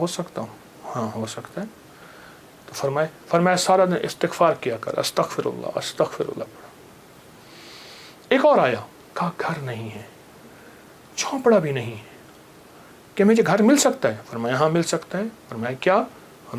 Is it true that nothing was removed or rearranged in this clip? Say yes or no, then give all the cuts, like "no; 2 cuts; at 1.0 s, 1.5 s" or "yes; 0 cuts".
yes; 0 cuts